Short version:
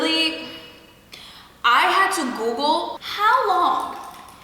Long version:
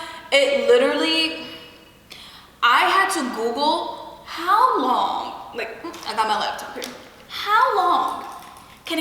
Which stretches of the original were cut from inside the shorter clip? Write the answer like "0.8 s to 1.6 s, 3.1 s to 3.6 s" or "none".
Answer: 4.0 s to 7.3 s